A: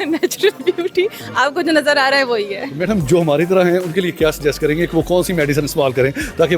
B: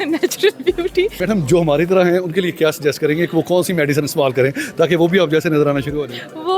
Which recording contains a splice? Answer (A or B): B